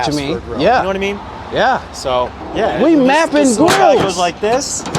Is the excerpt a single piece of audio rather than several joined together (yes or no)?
no